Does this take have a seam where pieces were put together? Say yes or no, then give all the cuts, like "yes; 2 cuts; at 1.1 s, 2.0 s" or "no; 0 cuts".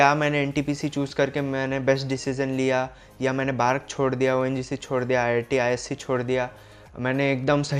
no; 0 cuts